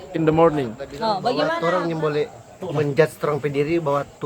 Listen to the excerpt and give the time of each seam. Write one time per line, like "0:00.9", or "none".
0:01.6

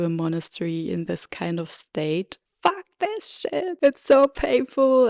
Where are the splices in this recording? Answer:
0:02.4
0:03.8

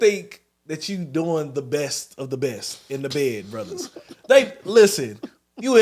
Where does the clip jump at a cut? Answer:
none

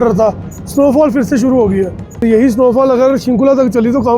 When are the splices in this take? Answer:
0:02.2

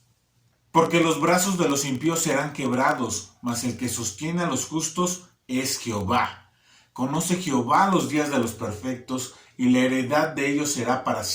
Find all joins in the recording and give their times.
0:06.4

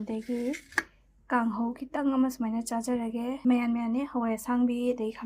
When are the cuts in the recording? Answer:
0:03.4

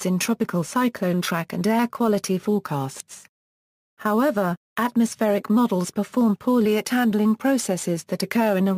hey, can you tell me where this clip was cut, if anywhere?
0:07.8

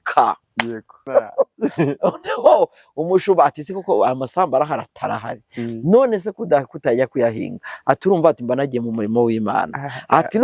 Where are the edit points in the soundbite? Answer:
0:01.1

